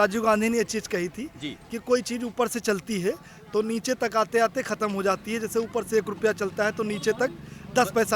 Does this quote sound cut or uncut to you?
uncut